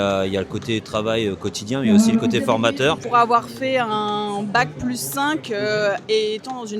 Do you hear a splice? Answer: yes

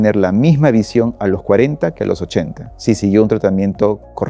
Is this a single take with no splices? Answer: yes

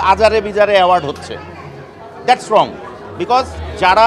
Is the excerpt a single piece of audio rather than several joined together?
yes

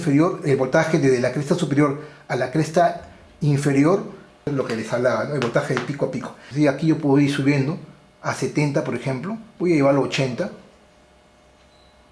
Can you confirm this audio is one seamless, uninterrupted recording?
no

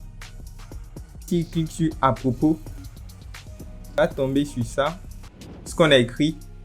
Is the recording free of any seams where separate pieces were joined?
no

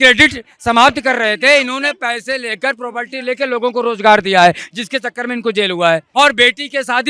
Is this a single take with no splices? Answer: no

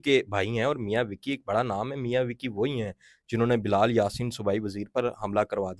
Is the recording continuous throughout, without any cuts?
yes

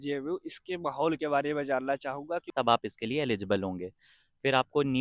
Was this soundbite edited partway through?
yes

